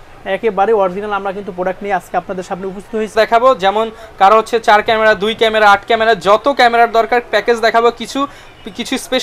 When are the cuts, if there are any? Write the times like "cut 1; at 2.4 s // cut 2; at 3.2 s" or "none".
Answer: cut 1; at 3.1 s